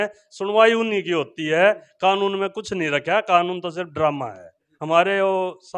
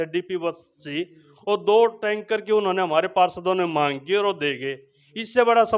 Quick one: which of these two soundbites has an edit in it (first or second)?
first